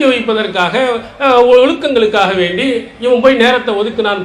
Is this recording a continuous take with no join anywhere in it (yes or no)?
yes